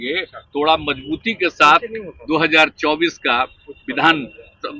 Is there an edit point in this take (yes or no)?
no